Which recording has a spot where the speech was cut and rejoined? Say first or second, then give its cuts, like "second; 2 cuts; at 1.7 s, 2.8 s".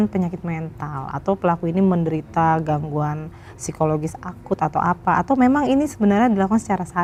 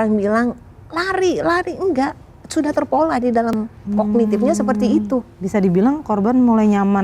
second; 1 cut; at 3.4 s